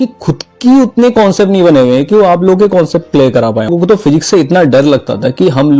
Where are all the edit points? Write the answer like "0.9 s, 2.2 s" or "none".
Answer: 3.7 s